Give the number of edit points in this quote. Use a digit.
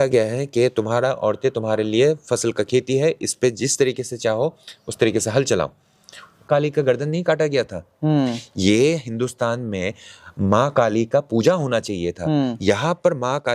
1